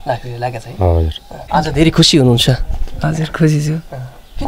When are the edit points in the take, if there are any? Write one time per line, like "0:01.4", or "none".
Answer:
0:01.5